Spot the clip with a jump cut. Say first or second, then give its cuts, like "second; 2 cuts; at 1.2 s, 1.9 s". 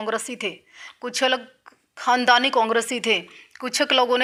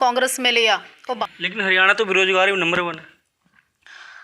second; 1 cut; at 1.2 s